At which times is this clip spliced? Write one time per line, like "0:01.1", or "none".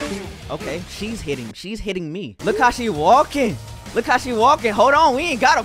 0:02.3

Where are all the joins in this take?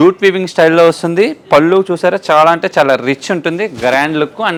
none

